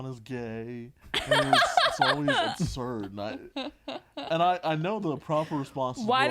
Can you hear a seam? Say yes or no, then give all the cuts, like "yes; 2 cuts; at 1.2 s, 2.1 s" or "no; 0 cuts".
no; 0 cuts